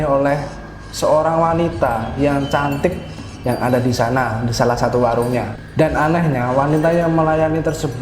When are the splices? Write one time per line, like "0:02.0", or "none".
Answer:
0:05.7